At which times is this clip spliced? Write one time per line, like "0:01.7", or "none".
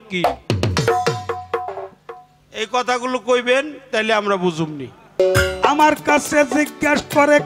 0:05.2